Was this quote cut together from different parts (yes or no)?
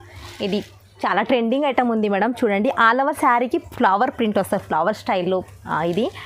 no